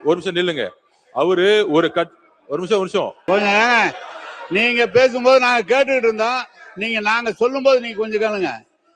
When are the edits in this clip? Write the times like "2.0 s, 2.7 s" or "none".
3.2 s